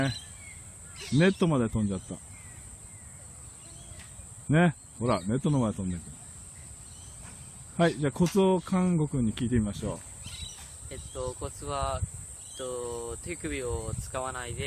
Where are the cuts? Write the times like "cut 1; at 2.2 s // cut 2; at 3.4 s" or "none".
none